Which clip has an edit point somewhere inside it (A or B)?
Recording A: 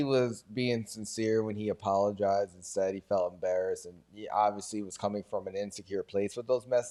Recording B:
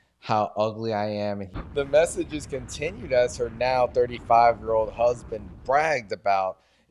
B